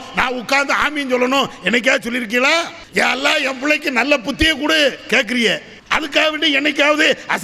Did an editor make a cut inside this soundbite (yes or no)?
yes